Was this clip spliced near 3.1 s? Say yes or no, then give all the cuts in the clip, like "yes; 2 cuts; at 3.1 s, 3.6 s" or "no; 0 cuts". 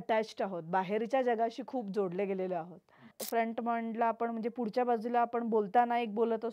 yes; 1 cut; at 3.1 s